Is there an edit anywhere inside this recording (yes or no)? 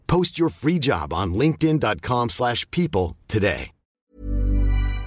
yes